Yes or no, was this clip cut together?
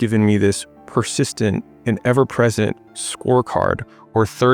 no